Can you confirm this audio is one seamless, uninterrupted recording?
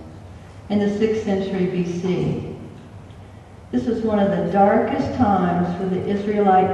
no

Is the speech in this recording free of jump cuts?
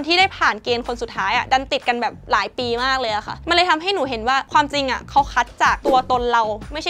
yes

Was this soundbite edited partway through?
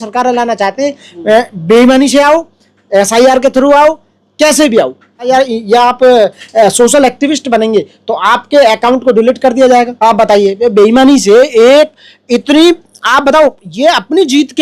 yes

